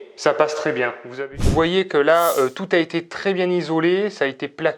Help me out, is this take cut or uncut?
cut